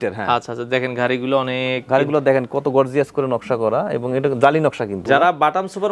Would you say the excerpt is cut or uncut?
cut